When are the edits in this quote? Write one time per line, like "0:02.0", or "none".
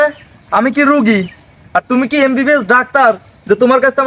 none